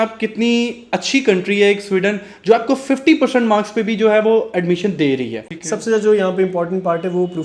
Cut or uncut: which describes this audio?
cut